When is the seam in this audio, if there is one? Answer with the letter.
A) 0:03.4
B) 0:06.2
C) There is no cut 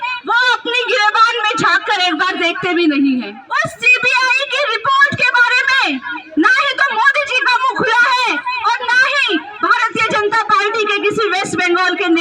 A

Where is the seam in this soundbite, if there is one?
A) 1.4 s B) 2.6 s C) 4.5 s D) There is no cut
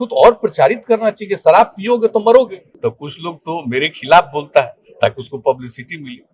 B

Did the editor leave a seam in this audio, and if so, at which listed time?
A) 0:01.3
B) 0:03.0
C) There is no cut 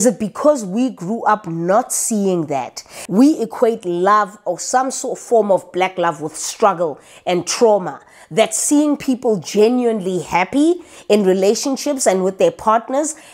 B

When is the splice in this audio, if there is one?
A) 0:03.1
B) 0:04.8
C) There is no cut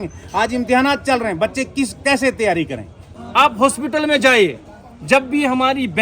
A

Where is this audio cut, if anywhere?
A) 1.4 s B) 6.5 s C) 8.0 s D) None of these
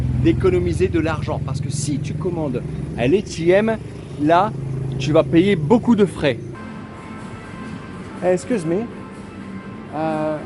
B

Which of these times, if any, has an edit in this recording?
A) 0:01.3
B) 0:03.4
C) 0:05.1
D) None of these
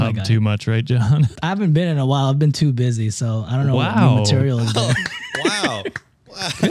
A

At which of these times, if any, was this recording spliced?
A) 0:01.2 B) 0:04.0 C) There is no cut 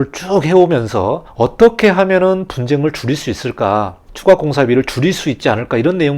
A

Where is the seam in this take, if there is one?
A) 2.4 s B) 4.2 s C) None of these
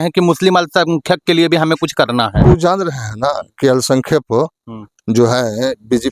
A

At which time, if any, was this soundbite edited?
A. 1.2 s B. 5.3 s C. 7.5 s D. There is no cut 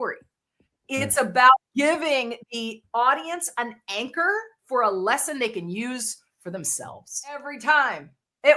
C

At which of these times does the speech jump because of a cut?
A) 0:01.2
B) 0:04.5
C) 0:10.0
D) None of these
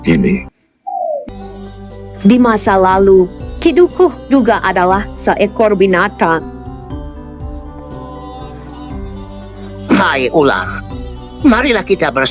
A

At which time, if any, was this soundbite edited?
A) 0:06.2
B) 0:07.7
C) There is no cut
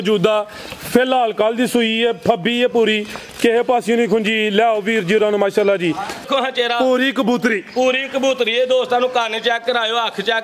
A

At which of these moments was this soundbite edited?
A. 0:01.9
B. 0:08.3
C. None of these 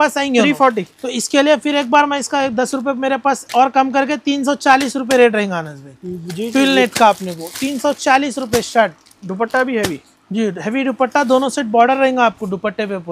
C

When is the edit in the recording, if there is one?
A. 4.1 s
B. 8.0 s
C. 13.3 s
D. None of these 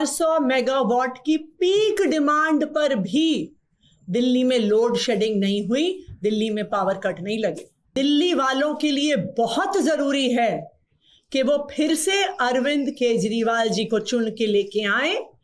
B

